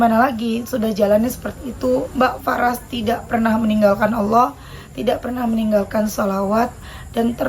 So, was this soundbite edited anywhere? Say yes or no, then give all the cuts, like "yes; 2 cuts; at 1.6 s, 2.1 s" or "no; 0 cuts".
no; 0 cuts